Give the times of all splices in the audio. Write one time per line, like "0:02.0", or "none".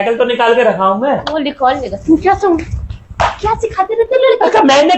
0:01.3